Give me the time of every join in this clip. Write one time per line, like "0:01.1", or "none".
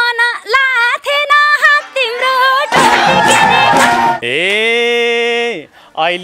0:04.2